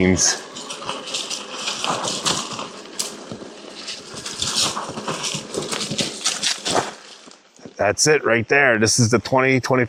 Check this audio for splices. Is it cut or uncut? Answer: uncut